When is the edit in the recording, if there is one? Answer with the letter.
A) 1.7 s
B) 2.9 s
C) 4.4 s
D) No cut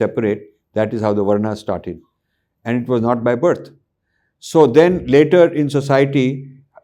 D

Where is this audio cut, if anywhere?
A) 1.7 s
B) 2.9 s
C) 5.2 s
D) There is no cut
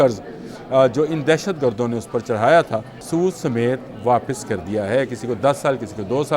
B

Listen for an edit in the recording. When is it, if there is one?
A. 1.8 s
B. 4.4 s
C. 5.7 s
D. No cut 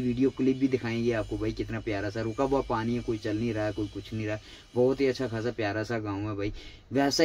D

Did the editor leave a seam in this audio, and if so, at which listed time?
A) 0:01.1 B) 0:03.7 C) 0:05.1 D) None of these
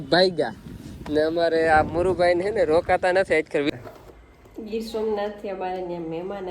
B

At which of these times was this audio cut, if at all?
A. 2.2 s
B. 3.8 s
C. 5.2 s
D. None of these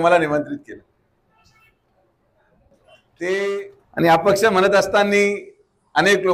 B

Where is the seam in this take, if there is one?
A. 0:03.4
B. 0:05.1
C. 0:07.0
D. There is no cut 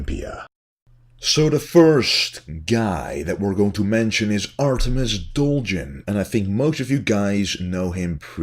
C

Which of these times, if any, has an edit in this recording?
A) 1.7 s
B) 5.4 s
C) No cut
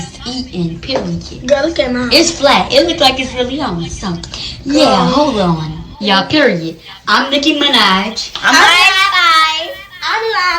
A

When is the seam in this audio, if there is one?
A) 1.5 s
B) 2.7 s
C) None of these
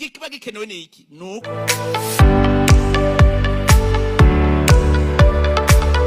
A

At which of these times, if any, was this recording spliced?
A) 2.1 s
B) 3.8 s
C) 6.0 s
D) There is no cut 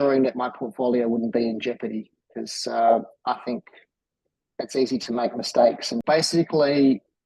C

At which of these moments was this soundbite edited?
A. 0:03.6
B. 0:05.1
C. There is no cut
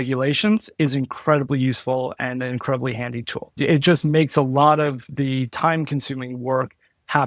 A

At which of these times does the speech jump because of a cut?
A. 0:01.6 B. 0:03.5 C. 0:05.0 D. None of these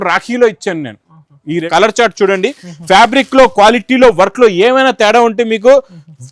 A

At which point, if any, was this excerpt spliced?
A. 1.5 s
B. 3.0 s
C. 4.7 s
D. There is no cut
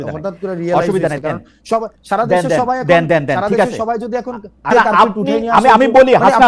C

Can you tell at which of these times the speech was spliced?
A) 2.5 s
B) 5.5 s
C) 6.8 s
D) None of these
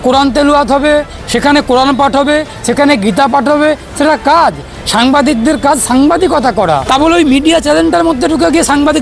C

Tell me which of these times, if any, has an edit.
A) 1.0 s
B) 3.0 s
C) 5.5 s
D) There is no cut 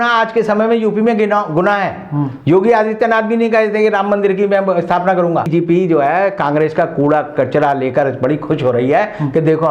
C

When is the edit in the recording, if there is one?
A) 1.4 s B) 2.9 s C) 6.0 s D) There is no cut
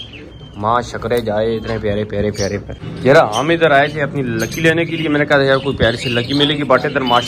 B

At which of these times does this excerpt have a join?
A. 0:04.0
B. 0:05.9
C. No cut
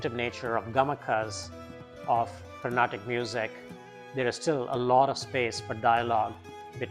C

